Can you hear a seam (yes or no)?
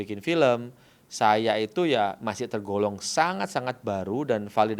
no